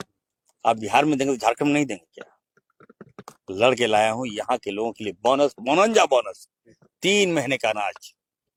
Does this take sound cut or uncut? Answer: uncut